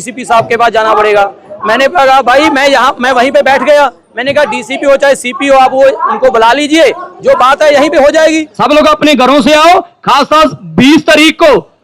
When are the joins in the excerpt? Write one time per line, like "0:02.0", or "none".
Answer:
0:08.5